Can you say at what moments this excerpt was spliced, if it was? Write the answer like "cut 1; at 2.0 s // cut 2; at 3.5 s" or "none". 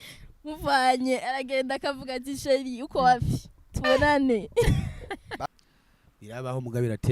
cut 1; at 5.4 s